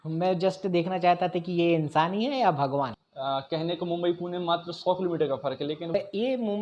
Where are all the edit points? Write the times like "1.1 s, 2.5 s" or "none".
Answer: 3.0 s, 5.9 s